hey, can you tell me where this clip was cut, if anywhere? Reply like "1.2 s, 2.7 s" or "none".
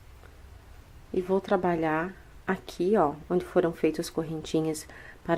none